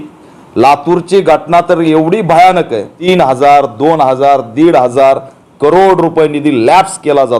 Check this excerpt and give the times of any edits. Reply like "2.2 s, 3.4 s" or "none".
3.1 s